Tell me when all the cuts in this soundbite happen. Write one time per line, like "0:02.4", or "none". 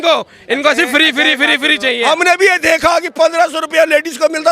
0:02.0